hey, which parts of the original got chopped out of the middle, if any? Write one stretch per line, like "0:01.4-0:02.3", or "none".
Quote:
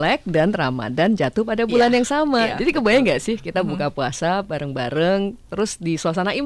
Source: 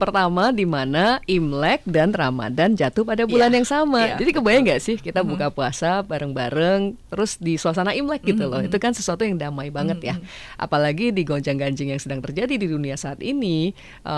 none